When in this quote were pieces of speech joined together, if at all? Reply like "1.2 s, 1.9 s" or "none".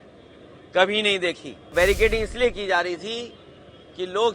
1.7 s